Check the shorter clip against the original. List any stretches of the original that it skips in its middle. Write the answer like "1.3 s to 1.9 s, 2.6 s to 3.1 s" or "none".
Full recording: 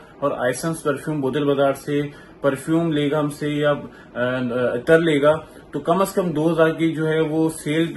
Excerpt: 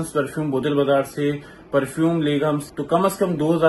3.4 s to 5.6 s